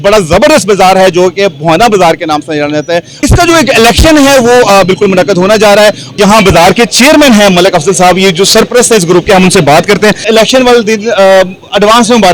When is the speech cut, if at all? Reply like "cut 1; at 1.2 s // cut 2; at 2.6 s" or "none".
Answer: cut 1; at 3.1 s // cut 2; at 6.1 s // cut 3; at 10.2 s

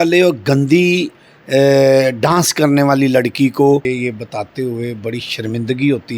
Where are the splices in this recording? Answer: cut 1; at 3.8 s

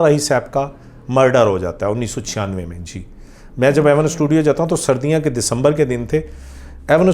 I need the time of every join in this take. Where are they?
none

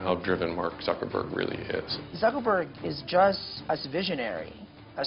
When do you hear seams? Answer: cut 1; at 2.0 s // cut 2; at 3.5 s

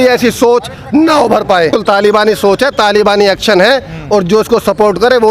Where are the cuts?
cut 1; at 1.7 s

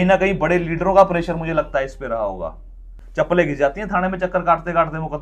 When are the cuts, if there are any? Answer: cut 1; at 3.0 s

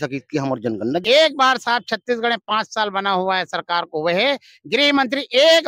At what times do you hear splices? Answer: cut 1; at 1.0 s

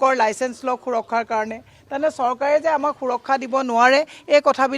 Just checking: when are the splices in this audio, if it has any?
none

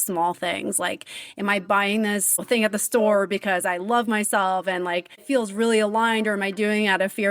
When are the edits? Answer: cut 1; at 2.3 s

